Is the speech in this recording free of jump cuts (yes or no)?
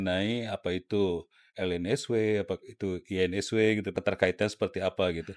no